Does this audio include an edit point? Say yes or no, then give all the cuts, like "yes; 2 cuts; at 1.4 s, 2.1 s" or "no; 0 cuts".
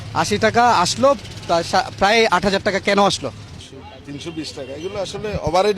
yes; 1 cut; at 3.5 s